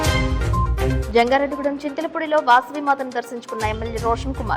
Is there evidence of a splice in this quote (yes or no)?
yes